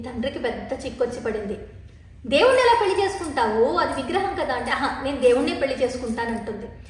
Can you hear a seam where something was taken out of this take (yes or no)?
no